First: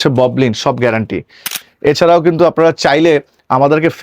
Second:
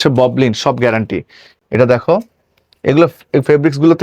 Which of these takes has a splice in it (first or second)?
first